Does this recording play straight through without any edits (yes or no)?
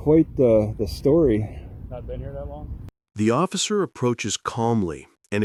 yes